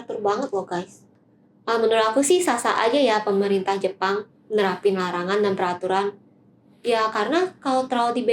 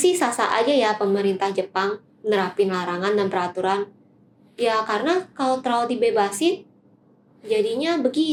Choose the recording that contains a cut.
first; 1 cut; at 1.3 s

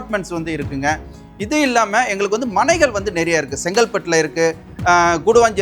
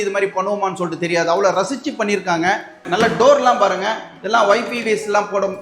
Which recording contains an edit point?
second; 1 cut; at 2.8 s

